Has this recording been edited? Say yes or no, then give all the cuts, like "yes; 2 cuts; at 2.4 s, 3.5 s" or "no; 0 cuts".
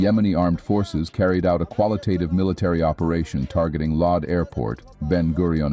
no; 0 cuts